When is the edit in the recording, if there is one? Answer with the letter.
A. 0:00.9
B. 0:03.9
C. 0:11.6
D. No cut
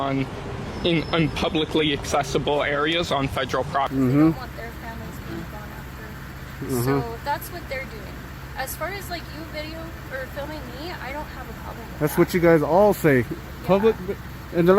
B